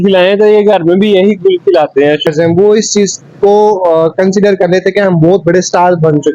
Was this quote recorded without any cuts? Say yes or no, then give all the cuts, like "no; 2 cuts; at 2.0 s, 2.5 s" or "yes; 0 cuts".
no; 1 cut; at 2.3 s